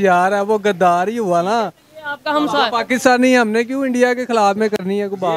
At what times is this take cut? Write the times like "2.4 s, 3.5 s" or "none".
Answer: none